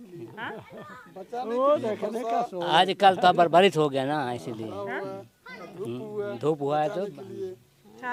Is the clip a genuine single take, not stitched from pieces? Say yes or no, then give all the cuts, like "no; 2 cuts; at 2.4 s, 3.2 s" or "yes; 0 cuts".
yes; 0 cuts